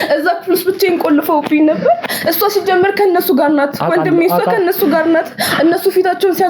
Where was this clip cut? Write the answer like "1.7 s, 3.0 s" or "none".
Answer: none